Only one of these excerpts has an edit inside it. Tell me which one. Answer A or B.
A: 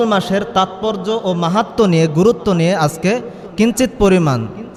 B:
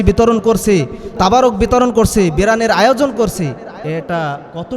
B